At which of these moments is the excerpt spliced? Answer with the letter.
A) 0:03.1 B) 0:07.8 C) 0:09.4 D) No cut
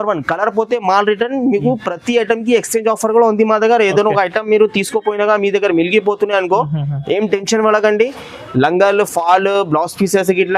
D